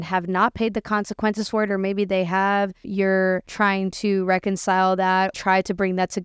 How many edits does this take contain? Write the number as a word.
two